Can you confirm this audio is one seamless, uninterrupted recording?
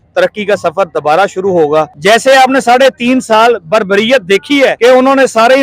no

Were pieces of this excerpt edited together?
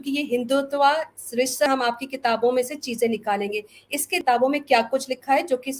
yes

